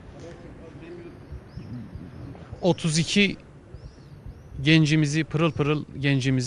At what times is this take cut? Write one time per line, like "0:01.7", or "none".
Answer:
0:03.5